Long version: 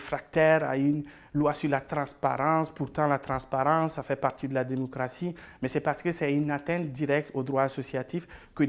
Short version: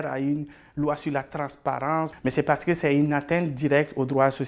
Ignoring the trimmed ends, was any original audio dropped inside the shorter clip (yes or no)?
yes